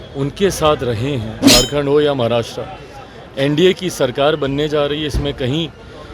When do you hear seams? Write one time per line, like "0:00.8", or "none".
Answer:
0:01.4